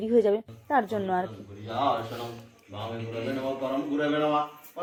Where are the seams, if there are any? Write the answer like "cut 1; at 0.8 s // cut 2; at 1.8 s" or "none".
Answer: none